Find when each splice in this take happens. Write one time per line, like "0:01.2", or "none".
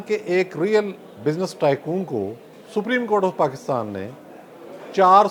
none

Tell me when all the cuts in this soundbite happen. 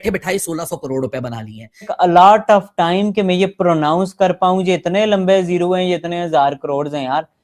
0:01.9

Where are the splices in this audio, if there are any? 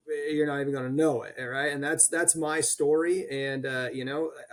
none

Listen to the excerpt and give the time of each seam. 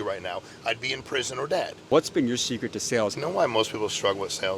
0:01.9
0:03.1

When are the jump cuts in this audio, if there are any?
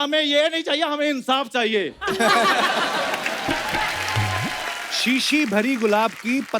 0:04.9

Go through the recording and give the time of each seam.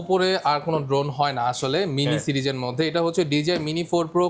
none

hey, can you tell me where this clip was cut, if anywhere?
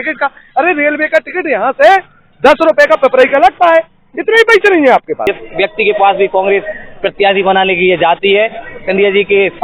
0:05.2

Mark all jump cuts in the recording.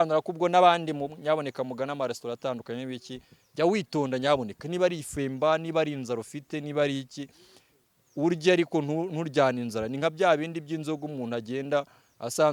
none

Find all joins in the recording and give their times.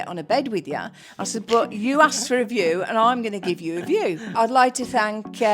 0:04.3

